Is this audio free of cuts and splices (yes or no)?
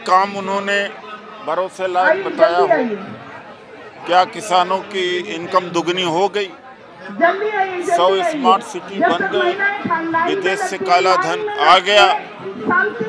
yes